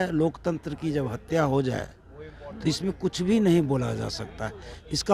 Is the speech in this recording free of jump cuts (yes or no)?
yes